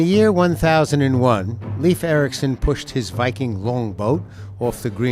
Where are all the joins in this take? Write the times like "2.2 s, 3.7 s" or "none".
none